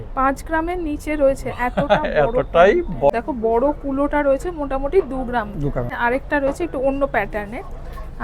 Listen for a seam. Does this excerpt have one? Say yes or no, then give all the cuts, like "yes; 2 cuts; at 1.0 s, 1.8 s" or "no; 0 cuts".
yes; 2 cuts; at 3.1 s, 5.9 s